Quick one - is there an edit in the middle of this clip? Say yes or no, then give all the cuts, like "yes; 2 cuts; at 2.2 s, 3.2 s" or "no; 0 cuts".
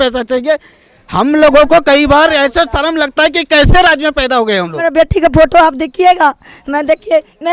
yes; 1 cut; at 4.8 s